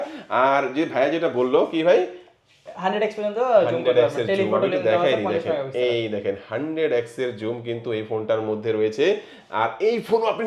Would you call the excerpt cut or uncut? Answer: uncut